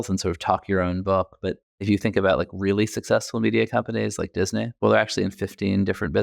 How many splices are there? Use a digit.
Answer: 2